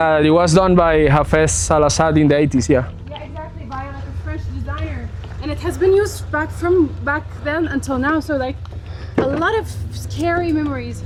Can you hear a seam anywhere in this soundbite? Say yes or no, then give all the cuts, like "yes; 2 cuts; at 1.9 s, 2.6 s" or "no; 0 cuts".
no; 0 cuts